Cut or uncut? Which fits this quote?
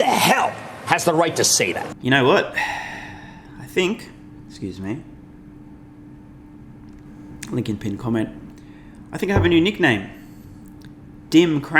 uncut